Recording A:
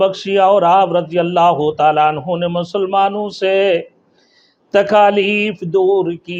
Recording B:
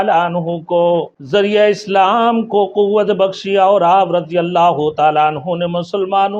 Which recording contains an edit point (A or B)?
B